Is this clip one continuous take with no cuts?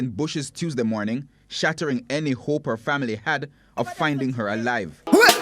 yes; 0 cuts

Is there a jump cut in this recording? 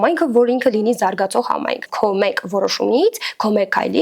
yes; 1 cut; at 1.9 s

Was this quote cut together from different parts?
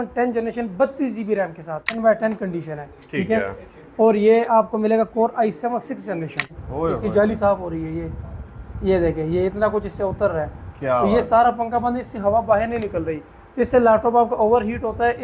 yes; 2 cuts; at 2.0 s, 6.6 s

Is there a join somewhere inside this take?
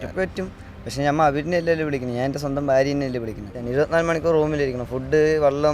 yes; 1 cut; at 3.6 s

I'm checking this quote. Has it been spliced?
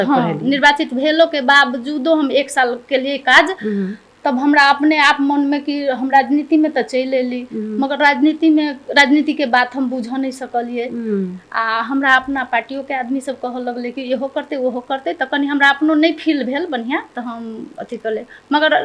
no; 0 cuts

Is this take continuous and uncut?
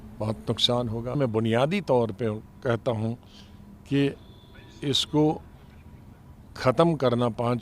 no; 1 cut; at 1.2 s

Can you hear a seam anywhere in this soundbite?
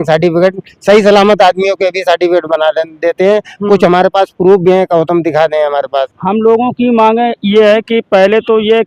yes; 1 cut; at 6.2 s

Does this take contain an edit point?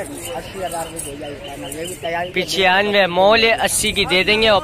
no; 0 cuts

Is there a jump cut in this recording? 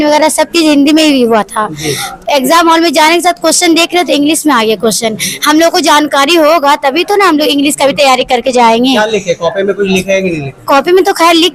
no; 0 cuts

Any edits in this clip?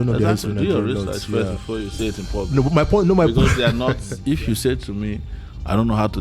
yes; 1 cut; at 4.1 s

